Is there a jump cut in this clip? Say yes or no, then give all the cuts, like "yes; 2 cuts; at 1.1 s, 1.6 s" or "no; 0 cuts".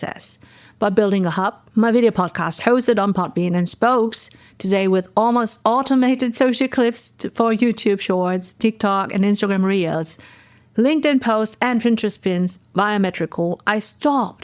no; 0 cuts